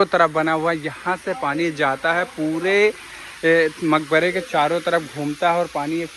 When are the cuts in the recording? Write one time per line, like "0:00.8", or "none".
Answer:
none